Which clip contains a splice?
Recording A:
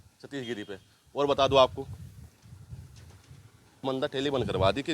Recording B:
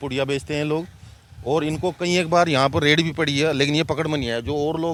A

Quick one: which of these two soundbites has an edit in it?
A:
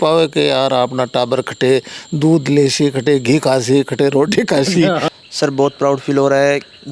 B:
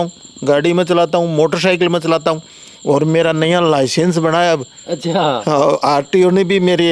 A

